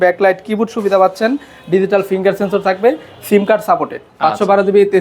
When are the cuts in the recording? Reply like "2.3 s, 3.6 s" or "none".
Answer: 4.0 s